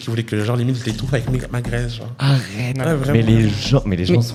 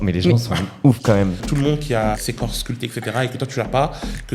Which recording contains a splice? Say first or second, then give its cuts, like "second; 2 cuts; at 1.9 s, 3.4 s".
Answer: second; 2 cuts; at 1.4 s, 2.2 s